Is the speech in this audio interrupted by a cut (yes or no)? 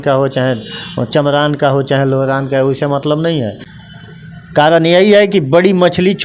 yes